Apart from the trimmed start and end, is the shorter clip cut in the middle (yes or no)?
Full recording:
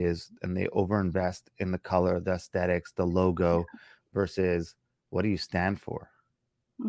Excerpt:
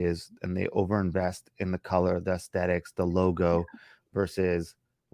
no